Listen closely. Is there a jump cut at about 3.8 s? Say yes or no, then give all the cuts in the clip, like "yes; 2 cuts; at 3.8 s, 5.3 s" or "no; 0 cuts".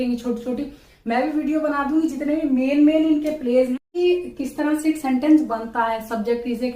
yes; 1 cut; at 3.8 s